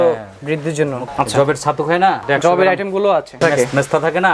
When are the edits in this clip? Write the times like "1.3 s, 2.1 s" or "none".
1.0 s, 2.2 s, 3.4 s